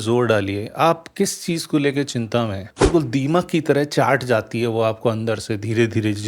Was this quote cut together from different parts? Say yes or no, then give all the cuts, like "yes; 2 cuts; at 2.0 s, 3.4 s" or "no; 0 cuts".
yes; 1 cut; at 2.7 s